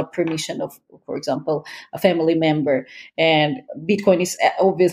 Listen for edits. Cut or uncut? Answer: uncut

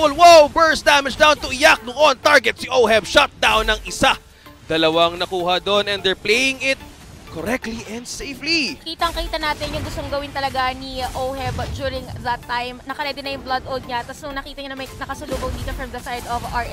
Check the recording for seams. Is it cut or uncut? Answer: uncut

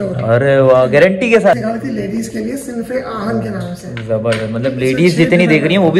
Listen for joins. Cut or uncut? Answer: cut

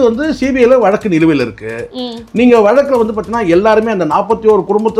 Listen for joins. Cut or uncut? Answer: uncut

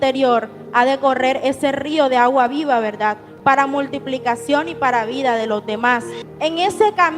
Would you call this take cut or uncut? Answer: cut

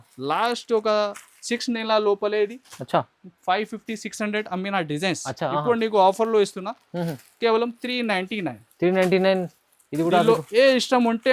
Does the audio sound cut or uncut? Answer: uncut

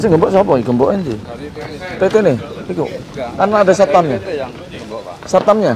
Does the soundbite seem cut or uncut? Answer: uncut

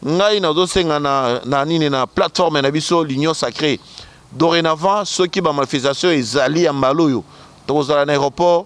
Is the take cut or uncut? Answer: uncut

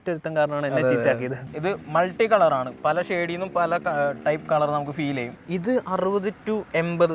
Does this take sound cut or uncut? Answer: cut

